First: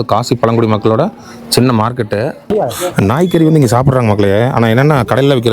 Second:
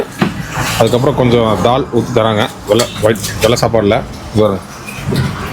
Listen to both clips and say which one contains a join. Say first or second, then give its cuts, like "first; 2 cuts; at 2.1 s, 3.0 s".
first; 1 cut; at 2.5 s